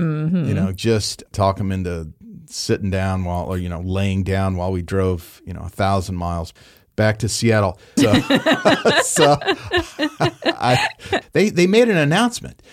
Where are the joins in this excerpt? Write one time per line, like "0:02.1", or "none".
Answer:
0:11.2